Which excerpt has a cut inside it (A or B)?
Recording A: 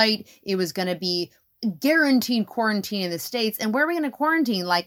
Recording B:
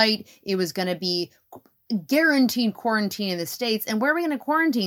A